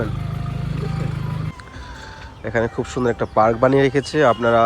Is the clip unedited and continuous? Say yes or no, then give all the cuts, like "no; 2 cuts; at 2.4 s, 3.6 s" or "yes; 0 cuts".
no; 1 cut; at 1.5 s